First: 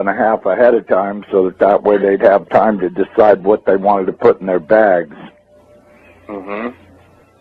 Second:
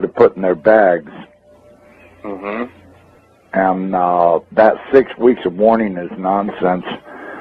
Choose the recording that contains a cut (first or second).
second